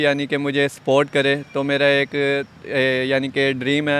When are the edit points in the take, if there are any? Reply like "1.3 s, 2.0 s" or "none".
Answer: none